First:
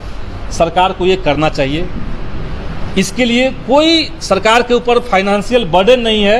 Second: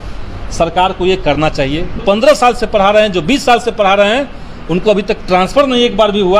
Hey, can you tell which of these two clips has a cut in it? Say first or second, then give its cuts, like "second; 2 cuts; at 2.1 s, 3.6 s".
second; 1 cut; at 2.0 s